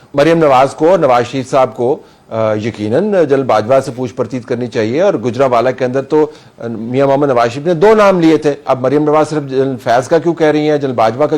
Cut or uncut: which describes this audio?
cut